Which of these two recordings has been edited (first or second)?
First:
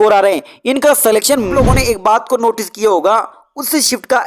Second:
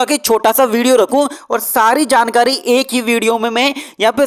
first